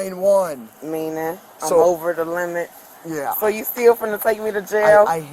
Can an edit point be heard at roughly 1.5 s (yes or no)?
no